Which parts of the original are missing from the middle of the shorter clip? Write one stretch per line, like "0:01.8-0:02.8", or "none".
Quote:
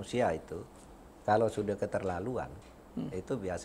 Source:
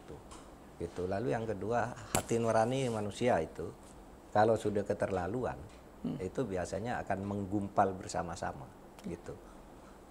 none